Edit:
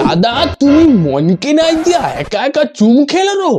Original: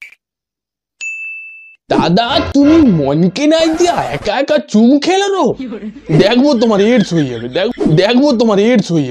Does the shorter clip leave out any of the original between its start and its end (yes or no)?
no